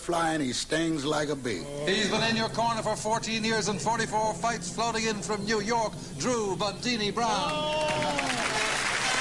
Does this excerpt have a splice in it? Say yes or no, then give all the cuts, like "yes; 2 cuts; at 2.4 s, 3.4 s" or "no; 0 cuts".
yes; 1 cut; at 5.0 s